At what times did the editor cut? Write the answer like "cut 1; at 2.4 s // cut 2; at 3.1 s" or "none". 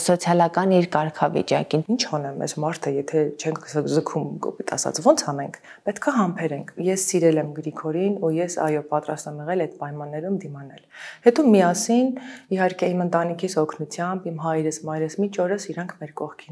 cut 1; at 1.8 s // cut 2; at 6.7 s